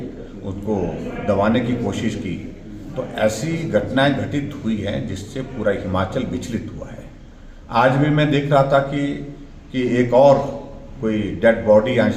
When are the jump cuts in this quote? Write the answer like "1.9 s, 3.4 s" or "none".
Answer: none